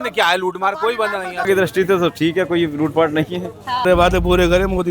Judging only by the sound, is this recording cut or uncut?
cut